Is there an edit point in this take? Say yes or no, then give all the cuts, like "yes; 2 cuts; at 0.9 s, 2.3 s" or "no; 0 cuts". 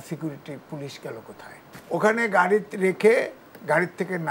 yes; 1 cut; at 1.7 s